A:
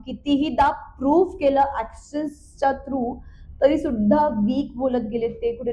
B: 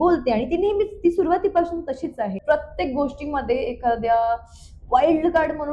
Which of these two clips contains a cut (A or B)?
B